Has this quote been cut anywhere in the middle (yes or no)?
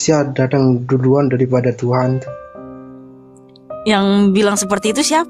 yes